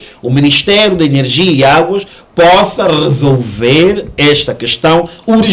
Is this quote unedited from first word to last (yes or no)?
yes